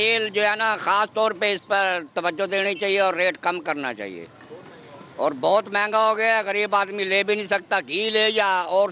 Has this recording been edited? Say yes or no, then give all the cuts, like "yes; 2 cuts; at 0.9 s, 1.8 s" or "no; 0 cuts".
no; 0 cuts